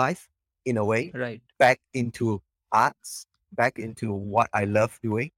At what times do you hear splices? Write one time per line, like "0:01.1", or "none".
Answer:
none